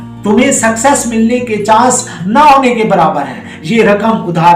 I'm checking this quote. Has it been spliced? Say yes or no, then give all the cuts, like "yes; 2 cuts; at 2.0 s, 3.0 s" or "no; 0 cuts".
yes; 1 cut; at 3.5 s